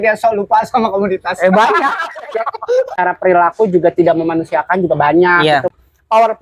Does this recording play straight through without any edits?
no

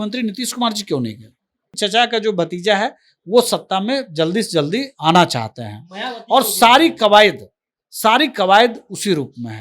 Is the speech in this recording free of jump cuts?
no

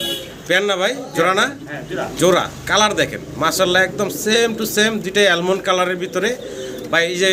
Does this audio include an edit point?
no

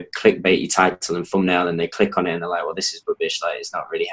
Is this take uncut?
yes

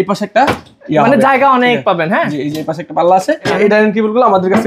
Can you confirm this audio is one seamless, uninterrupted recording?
no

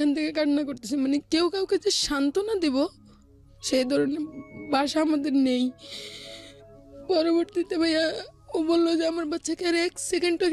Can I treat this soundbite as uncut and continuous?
yes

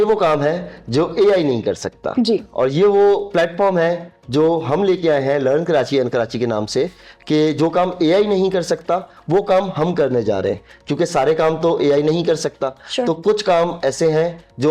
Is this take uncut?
yes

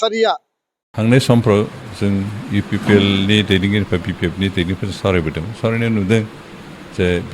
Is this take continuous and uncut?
no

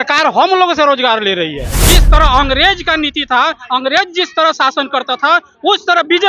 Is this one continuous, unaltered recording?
no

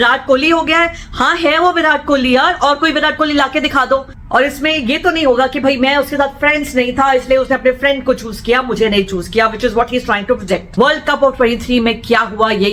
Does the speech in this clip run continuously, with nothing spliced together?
no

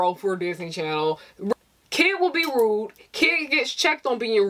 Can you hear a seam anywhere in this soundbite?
yes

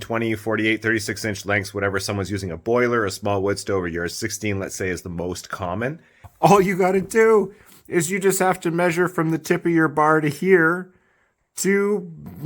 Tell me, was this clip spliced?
yes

